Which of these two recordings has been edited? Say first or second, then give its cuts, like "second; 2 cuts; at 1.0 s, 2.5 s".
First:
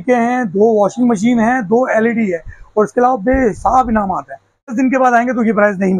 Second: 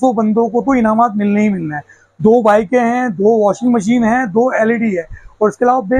first; 1 cut; at 4.7 s